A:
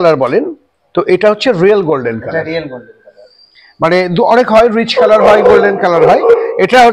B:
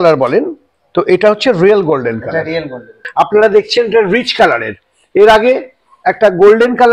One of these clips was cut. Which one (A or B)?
B